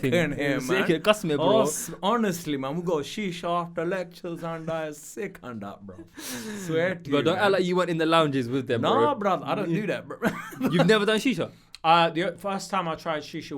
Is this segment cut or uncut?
uncut